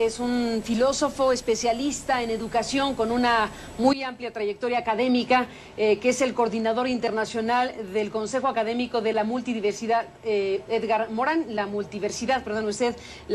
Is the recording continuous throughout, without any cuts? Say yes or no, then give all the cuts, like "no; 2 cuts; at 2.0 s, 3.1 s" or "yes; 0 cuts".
yes; 0 cuts